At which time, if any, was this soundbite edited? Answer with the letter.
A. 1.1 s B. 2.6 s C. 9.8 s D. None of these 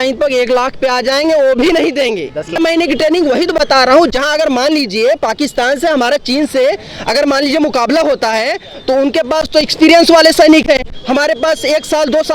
B